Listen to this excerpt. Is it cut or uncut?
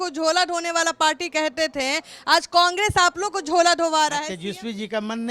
cut